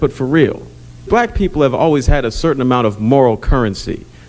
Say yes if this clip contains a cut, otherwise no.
yes